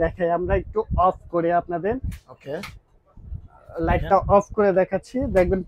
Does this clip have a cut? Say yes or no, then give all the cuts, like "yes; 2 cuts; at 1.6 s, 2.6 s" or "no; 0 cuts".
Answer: no; 0 cuts